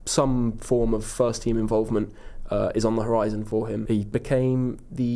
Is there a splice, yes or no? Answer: yes